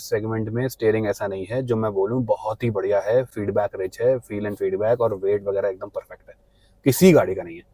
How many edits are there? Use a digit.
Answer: 0